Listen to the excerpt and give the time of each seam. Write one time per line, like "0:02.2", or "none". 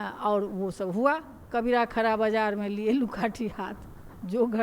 0:01.3